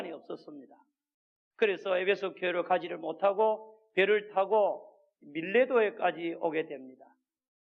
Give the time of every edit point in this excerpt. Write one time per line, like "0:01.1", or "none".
none